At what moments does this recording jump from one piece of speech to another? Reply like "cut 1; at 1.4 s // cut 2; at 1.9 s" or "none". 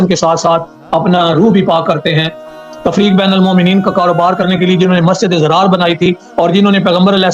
cut 1; at 2.7 s